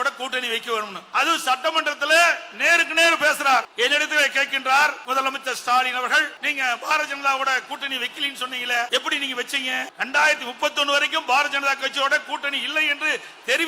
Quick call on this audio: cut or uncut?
cut